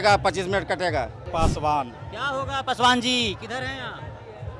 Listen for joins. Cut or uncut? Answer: cut